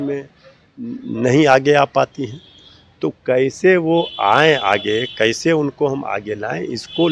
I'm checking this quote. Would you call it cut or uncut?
uncut